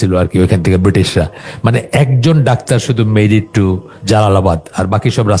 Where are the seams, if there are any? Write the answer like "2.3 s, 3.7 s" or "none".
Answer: none